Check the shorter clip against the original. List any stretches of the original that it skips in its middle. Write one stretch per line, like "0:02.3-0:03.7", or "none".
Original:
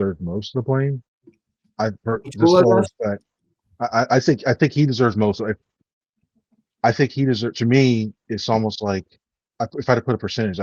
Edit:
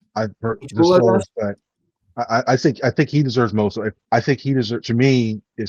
0:05.6-0:06.7